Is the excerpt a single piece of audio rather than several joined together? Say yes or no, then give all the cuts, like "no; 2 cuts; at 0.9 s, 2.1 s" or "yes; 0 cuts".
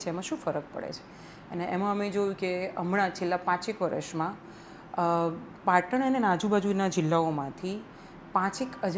yes; 0 cuts